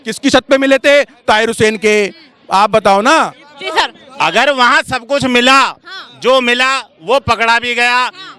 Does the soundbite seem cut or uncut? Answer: uncut